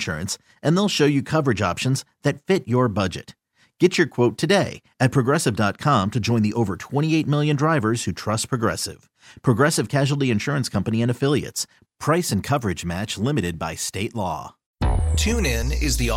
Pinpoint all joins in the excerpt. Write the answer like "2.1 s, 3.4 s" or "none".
14.6 s